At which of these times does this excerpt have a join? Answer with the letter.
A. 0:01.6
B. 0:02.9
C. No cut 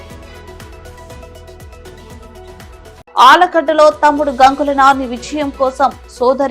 A